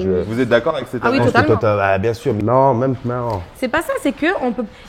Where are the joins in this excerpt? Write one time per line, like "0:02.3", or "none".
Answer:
0:02.4